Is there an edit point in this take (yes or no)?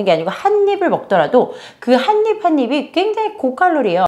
no